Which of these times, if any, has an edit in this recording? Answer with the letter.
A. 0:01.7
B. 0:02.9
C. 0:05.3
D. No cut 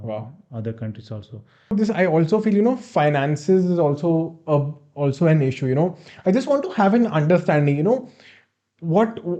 A